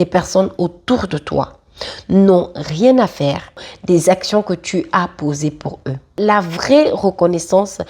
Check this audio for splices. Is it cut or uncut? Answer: cut